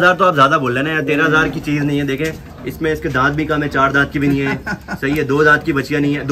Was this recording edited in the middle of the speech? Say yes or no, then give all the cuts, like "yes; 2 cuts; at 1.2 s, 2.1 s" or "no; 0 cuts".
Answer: no; 0 cuts